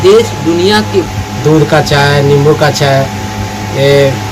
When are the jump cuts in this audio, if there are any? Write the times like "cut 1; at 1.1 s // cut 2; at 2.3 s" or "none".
cut 1; at 1.1 s